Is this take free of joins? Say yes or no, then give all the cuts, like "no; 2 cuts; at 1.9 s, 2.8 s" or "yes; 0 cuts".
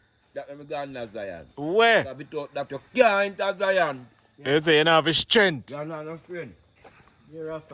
yes; 0 cuts